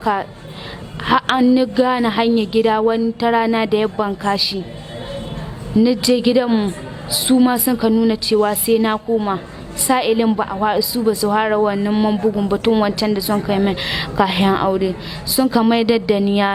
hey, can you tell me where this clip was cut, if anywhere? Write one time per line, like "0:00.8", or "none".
none